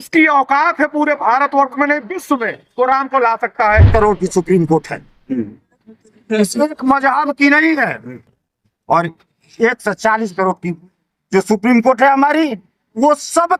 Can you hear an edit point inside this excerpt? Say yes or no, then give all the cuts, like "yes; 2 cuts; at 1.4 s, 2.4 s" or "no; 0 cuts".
yes; 1 cut; at 3.9 s